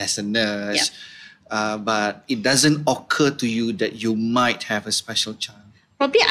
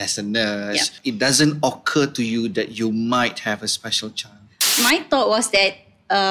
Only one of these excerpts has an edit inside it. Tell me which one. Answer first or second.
second